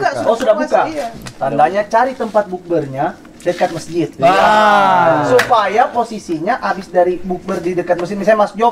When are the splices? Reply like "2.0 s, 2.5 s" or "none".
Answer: none